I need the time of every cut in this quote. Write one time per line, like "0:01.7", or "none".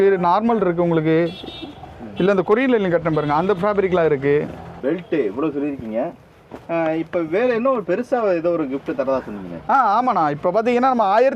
0:04.7